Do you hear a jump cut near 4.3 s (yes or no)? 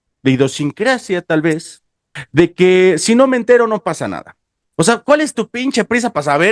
no